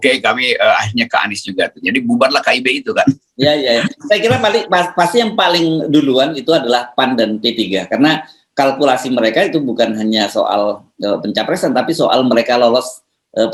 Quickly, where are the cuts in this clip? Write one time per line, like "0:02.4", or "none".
none